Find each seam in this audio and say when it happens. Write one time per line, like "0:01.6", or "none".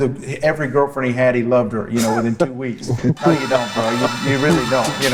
none